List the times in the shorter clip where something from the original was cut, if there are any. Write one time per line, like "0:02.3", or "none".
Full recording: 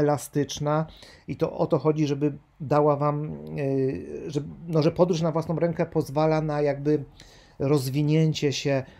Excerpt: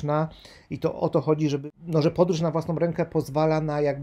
0:01.6